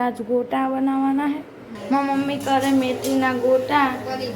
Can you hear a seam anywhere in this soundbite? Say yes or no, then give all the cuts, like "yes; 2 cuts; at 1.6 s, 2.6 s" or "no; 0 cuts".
yes; 1 cut; at 1.7 s